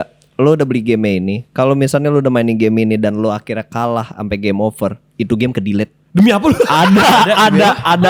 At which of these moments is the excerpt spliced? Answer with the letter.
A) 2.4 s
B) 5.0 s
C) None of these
C